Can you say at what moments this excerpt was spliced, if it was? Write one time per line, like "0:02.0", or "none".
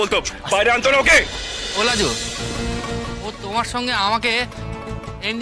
0:02.2

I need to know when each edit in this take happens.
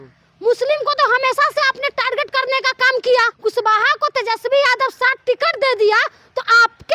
0:03.3

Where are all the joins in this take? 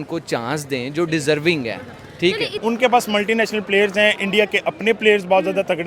0:02.6

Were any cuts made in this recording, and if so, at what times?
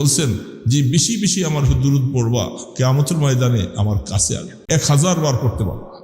0:04.6

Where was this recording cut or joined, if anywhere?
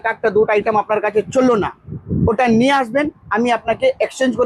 none

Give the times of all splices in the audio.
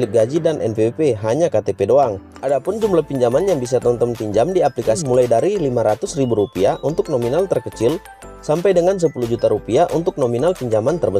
0:02.3
0:05.0

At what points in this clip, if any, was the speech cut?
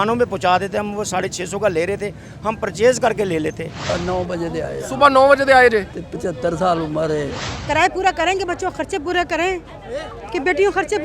0:03.7
0:07.5

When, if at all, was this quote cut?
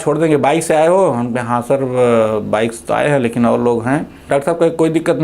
0:04.2

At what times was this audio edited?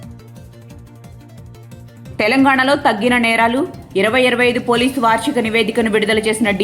0:01.8

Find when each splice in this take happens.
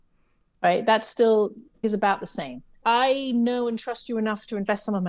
0:01.8
0:02.6

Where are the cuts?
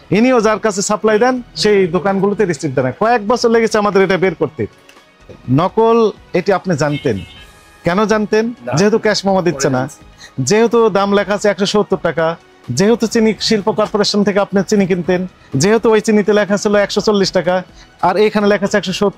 0:05.4

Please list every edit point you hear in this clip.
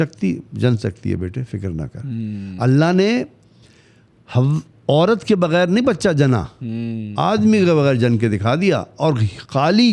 none

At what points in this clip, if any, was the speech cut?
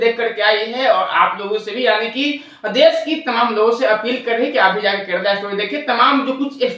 none

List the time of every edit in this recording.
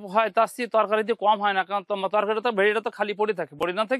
none

